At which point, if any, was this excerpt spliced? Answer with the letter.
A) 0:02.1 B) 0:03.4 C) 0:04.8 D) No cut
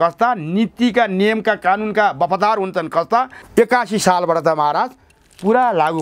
B